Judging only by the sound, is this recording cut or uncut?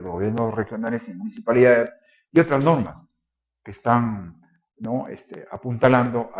uncut